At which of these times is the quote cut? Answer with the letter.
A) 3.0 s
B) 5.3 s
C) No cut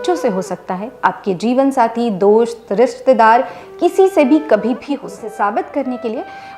B